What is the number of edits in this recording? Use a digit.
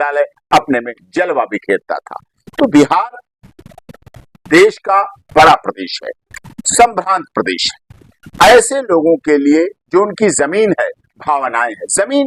0